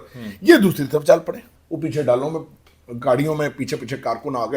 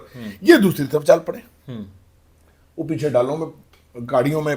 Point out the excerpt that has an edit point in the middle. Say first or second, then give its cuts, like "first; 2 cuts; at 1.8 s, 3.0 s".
first; 1 cut; at 1.5 s